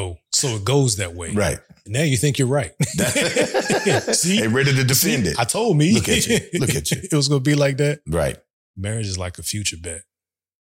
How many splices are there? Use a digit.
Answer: 1